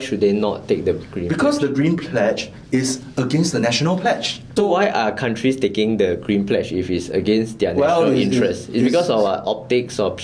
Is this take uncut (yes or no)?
yes